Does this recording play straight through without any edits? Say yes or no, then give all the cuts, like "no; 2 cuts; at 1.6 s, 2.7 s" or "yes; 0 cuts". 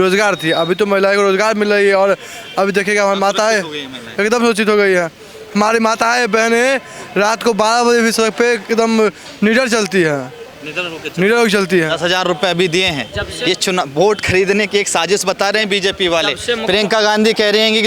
yes; 0 cuts